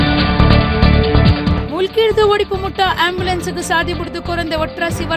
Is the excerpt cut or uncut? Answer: uncut